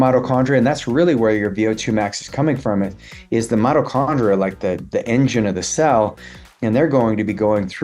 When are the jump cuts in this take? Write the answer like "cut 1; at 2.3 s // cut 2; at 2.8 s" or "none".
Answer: none